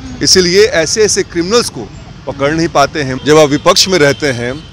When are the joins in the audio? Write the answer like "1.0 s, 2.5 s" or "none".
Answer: 3.2 s